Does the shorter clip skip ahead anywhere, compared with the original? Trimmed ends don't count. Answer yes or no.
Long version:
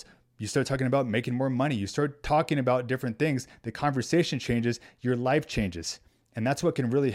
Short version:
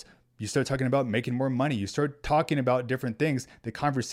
no